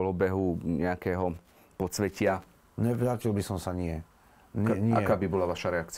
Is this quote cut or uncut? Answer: uncut